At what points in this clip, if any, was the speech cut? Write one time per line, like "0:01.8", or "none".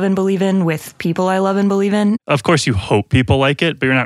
0:02.2

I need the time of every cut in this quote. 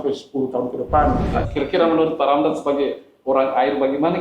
0:01.5

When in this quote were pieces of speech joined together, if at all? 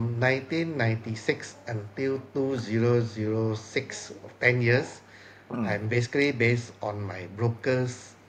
none

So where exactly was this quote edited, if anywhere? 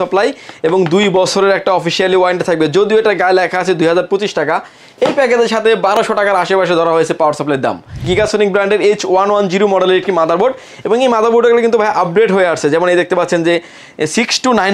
0:08.0

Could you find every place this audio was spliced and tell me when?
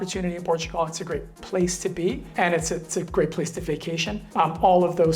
0:02.2
0:04.2

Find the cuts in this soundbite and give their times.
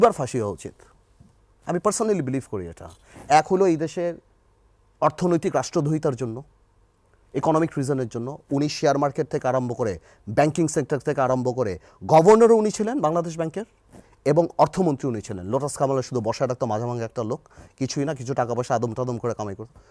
none

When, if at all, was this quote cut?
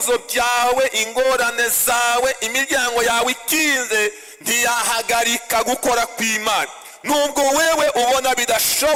none

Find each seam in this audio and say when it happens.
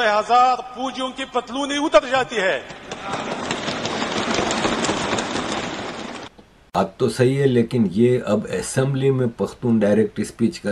none

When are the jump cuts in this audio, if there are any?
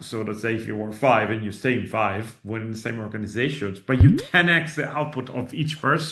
none

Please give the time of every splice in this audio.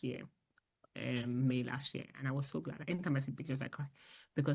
0:02.8

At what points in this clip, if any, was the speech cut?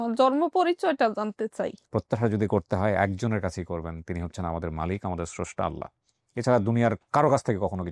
0:01.8

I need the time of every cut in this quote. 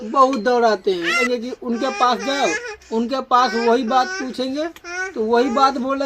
0:01.2

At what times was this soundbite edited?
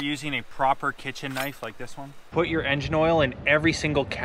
0:02.2

